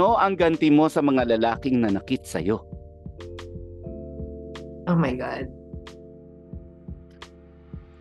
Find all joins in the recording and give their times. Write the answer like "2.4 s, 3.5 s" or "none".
none